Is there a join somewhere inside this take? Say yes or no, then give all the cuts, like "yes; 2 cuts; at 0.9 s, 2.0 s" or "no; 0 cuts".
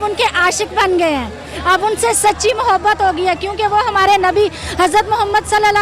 no; 0 cuts